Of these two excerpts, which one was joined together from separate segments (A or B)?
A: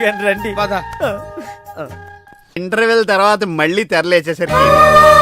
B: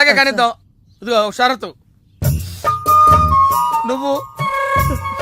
A